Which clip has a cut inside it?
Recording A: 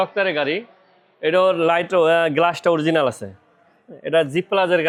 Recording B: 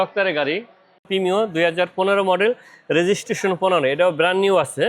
B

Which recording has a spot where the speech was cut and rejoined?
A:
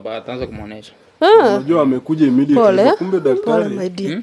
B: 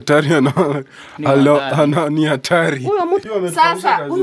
B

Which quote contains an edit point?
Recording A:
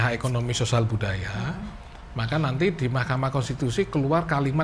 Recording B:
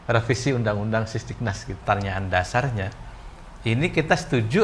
B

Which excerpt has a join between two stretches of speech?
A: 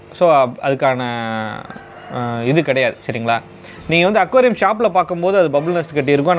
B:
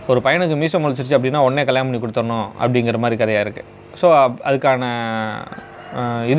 A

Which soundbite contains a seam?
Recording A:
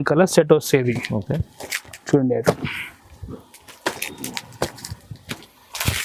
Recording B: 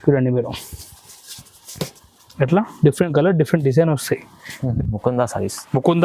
B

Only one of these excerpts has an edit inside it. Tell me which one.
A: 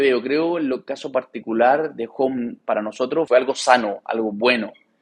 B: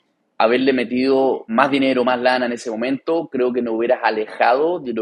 B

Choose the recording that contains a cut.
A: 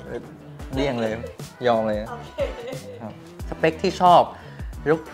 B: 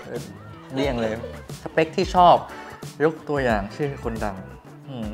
B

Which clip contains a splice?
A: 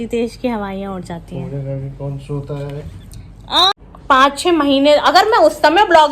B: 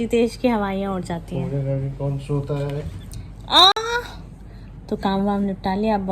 A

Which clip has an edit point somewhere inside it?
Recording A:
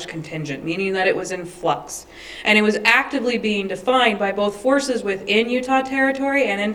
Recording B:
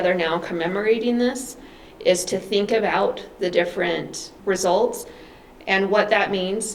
B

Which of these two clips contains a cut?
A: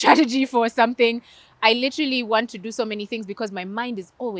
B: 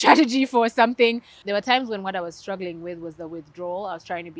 B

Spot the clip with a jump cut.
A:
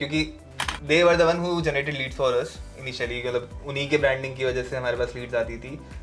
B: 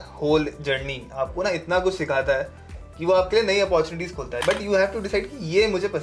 B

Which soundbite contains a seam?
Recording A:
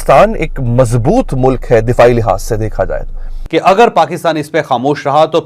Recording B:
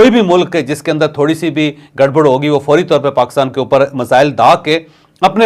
A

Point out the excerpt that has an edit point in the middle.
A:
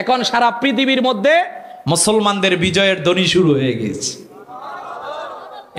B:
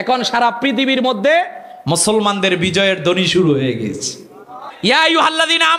B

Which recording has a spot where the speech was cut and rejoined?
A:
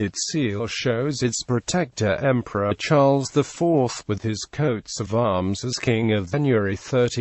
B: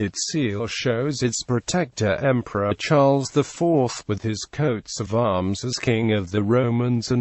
B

